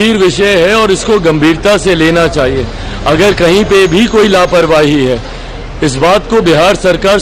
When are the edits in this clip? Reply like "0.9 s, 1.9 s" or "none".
none